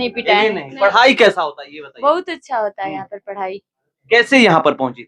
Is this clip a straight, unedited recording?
yes; 0 cuts

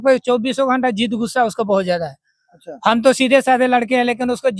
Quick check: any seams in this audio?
no; 0 cuts

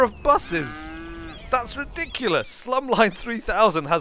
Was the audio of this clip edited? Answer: no; 0 cuts

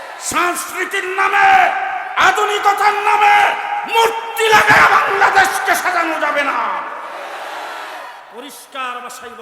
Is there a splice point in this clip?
yes; 1 cut; at 8.2 s

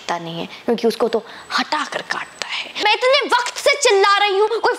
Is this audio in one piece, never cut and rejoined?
no; 1 cut; at 2.8 s

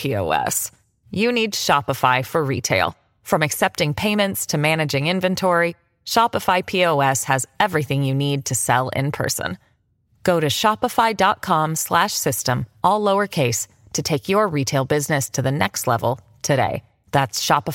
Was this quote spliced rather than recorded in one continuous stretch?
no; 0 cuts

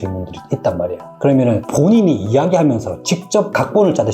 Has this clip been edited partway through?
yes; 1 cut; at 1.1 s

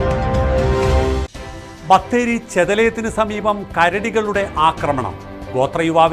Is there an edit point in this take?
no; 0 cuts

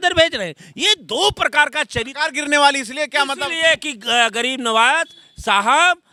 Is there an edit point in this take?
no; 0 cuts

